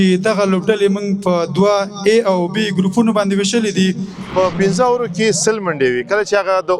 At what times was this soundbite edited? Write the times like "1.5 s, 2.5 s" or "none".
4.1 s